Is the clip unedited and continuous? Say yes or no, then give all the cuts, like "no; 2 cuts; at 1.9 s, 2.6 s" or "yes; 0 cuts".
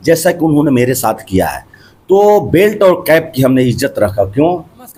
yes; 0 cuts